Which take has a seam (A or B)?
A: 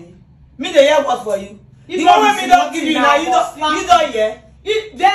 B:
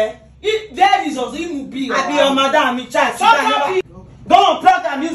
B